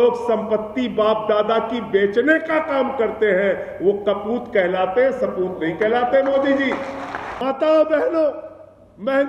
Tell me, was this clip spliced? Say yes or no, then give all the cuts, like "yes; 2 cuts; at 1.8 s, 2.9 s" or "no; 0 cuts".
yes; 1 cut; at 7.2 s